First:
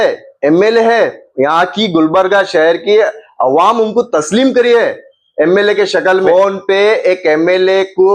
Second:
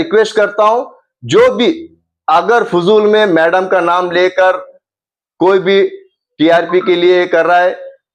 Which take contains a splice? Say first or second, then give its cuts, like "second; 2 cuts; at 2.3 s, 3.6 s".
first; 1 cut; at 6.3 s